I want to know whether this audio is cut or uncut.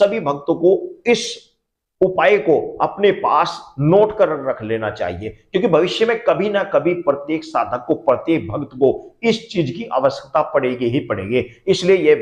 uncut